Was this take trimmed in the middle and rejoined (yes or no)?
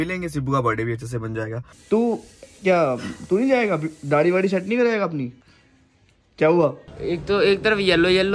yes